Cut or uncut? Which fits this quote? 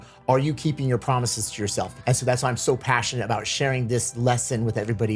cut